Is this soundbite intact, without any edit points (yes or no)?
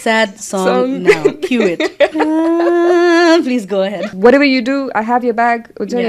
no